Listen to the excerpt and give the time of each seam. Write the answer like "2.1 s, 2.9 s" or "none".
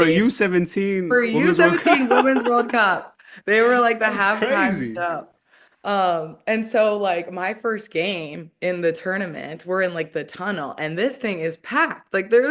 none